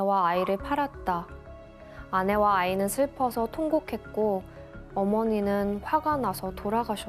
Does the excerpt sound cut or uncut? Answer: uncut